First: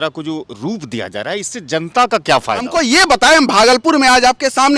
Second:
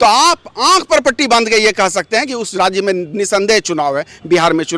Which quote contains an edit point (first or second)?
first